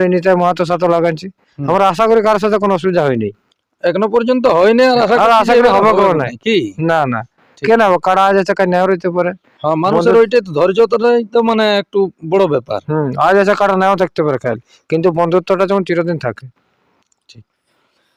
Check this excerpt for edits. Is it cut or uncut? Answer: uncut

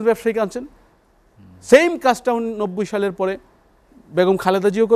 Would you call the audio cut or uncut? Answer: uncut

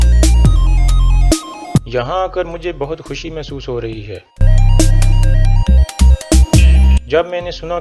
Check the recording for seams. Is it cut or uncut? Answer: cut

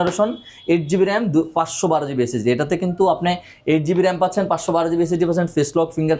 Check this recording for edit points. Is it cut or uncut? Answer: uncut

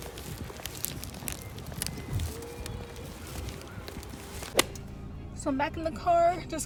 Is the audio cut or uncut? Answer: uncut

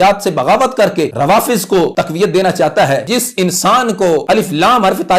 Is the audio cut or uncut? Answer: cut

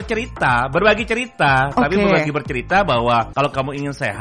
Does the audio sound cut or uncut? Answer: cut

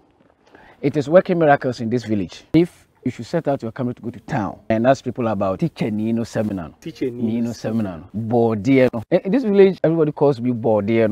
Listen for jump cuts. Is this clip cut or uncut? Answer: cut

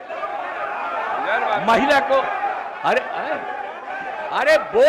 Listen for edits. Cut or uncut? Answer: uncut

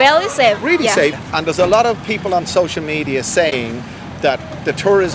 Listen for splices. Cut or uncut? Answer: cut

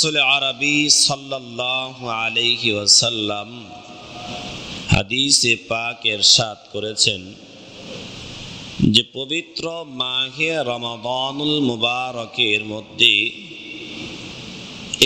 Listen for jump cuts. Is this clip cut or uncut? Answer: uncut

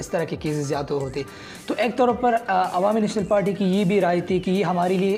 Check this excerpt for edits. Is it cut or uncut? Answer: uncut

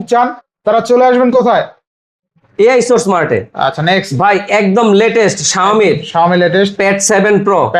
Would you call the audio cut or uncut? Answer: uncut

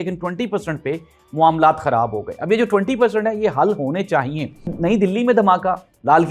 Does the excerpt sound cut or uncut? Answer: cut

